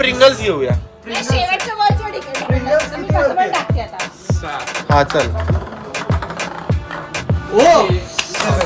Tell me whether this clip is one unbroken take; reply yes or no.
yes